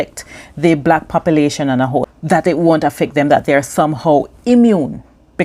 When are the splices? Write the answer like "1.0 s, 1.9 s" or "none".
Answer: 2.1 s